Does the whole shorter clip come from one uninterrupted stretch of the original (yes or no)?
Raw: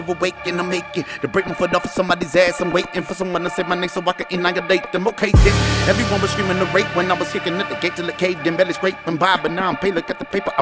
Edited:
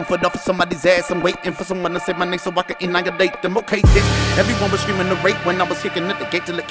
yes